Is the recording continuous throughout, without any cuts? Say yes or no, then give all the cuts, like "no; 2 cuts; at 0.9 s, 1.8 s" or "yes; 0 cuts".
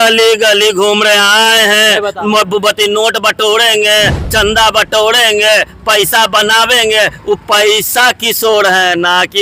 yes; 0 cuts